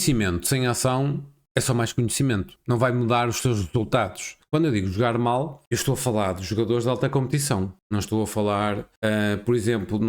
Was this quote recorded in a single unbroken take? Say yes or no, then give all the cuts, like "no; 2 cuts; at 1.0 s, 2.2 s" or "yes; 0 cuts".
no; 6 cuts; at 1.3 s, 2.5 s, 4.3 s, 5.6 s, 7.8 s, 8.9 s